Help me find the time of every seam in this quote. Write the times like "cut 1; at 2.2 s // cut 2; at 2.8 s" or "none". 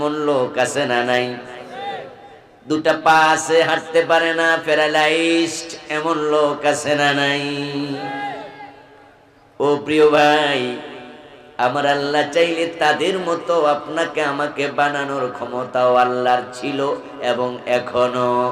none

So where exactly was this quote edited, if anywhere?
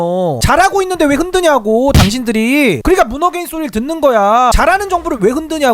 none

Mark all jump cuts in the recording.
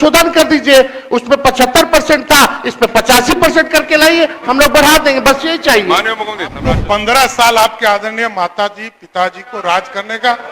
cut 1; at 6.7 s

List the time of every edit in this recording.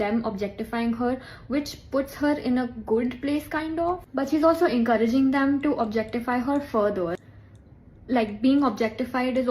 cut 1; at 4.7 s

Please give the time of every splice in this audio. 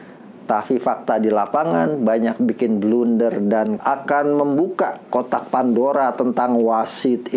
cut 1; at 3.8 s

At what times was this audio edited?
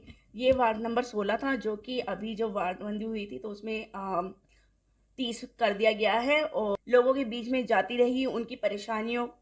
cut 1; at 6.7 s

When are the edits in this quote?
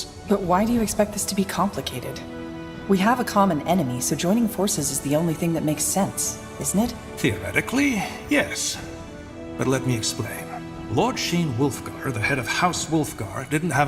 cut 1; at 11.2 s

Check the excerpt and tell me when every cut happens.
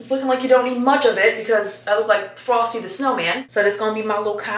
cut 1; at 3.4 s

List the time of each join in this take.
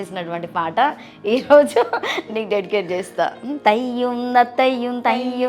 cut 1; at 3.5 s

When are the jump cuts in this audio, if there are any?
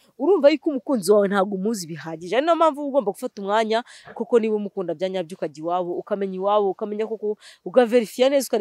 none

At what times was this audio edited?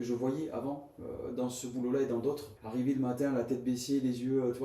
cut 1; at 2.5 s

